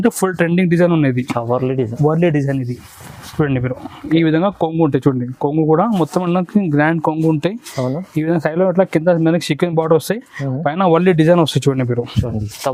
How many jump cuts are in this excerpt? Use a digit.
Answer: 0